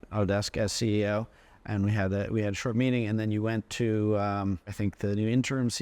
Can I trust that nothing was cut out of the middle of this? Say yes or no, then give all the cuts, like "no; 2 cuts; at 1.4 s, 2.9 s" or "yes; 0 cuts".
no; 1 cut; at 4.7 s